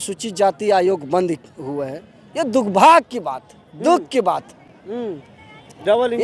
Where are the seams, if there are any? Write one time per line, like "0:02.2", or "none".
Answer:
none